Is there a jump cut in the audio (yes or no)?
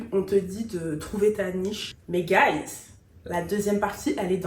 yes